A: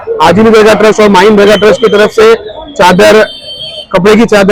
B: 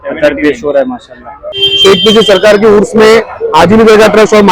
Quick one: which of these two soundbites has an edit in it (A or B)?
B